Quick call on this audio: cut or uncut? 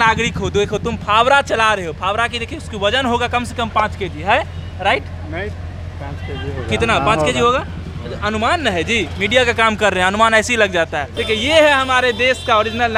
uncut